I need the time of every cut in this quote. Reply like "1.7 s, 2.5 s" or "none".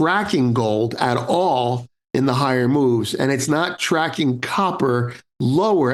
none

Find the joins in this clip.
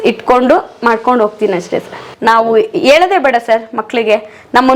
2.0 s

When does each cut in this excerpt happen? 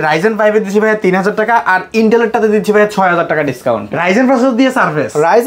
3.9 s

